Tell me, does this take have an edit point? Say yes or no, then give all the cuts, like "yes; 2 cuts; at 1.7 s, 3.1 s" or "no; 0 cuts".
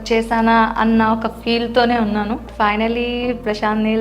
yes; 1 cut; at 2.5 s